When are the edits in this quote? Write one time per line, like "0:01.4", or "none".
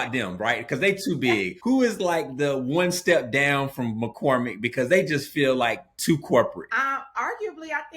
0:01.5

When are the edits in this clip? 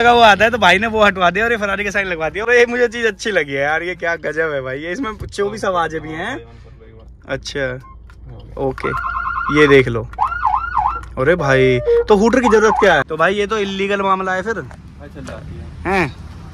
0:02.4
0:13.0

